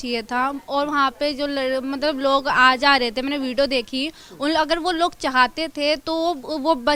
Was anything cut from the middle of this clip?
no; 0 cuts

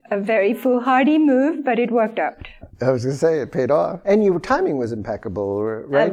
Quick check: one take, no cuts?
yes; 0 cuts

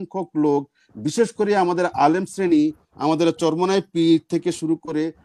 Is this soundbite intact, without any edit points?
yes; 0 cuts

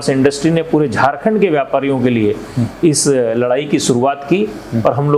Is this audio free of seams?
yes; 0 cuts

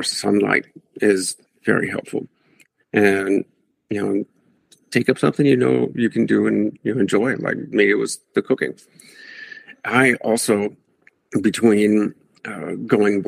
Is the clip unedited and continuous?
no; 1 cut; at 1.4 s

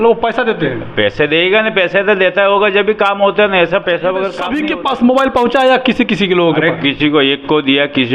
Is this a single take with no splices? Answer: no; 1 cut; at 4.4 s

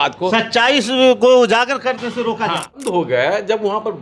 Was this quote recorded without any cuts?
no; 1 cut; at 2.8 s

